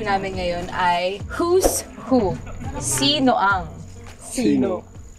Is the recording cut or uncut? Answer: uncut